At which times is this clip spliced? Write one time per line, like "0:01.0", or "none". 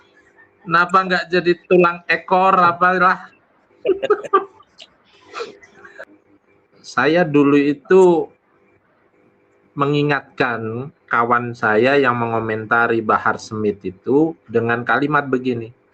0:06.0